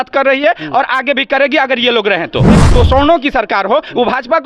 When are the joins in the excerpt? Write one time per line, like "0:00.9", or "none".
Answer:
0:02.6